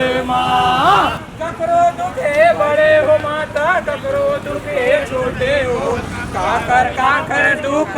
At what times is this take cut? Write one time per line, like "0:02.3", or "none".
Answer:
0:01.3